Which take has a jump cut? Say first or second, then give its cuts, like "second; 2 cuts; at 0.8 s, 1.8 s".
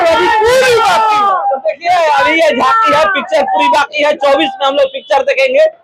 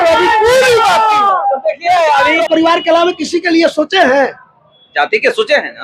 second; 1 cut; at 2.4 s